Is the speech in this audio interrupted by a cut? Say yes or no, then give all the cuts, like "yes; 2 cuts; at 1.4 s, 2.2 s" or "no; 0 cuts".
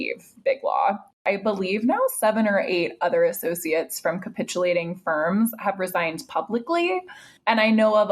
yes; 1 cut; at 1.2 s